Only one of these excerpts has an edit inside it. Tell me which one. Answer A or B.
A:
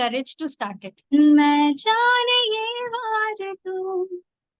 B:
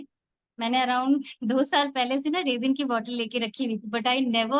A